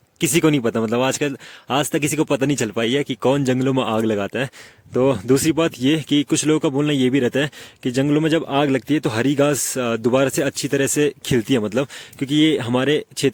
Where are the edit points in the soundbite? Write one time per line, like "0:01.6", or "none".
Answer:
none